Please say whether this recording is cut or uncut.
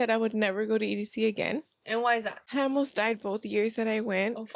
cut